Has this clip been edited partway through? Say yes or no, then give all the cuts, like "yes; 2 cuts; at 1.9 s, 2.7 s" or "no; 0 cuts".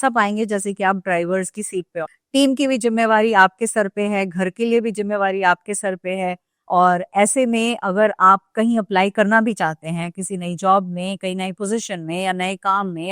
yes; 2 cuts; at 2.1 s, 6.5 s